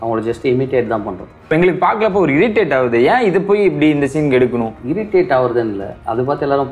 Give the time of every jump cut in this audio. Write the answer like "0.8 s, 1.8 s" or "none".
1.5 s, 4.8 s